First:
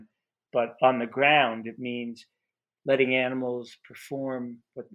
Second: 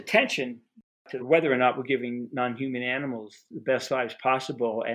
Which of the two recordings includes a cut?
second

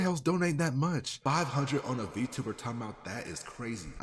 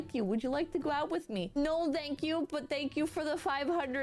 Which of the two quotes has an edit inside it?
first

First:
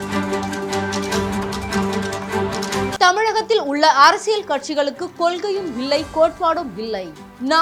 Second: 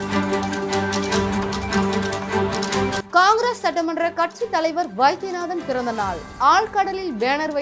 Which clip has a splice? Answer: second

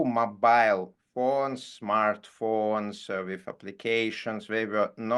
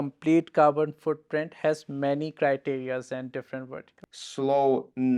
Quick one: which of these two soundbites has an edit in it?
second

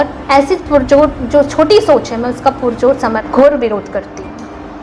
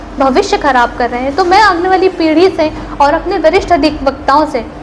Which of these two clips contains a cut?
first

